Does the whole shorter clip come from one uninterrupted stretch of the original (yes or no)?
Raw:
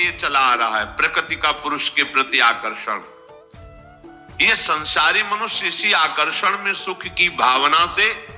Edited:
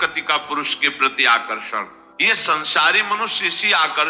no